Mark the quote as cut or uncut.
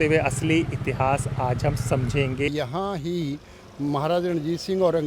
cut